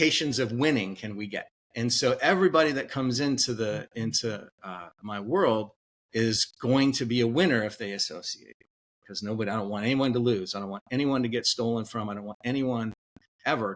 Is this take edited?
no; 0 cuts

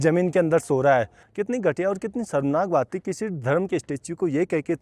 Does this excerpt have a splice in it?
yes; 1 cut; at 1.2 s

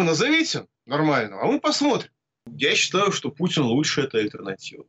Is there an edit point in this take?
yes; 1 cut; at 2.5 s

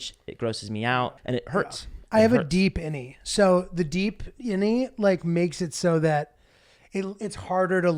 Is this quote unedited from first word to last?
no; 1 cut; at 1.2 s

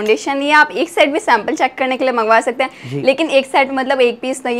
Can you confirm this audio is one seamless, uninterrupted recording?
yes; 0 cuts

